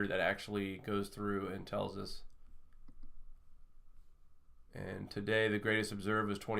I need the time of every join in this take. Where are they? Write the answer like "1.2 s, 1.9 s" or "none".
1.0 s